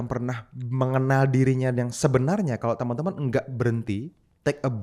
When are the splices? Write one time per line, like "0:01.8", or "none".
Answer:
none